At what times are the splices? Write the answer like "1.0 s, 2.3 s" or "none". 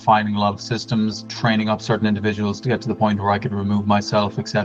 1.3 s